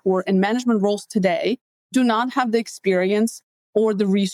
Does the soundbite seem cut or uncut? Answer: uncut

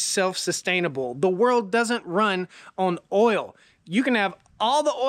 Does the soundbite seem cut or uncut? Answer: uncut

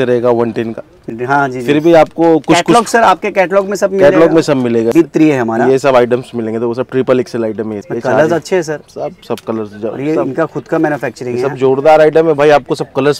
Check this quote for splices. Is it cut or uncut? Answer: cut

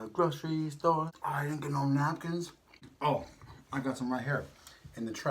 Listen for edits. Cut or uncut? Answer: cut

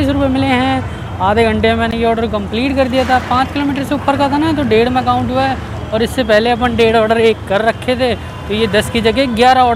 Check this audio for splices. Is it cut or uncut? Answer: uncut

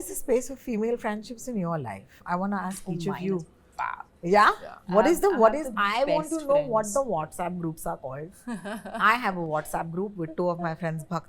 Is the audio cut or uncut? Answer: uncut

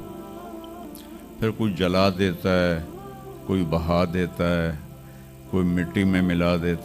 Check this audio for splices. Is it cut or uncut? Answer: uncut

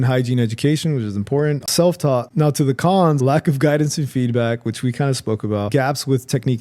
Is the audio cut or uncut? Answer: cut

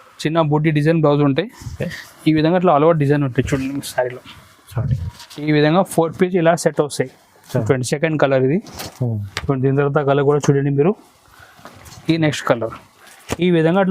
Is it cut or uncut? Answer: cut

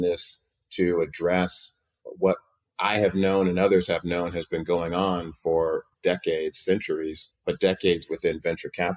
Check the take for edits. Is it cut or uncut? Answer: uncut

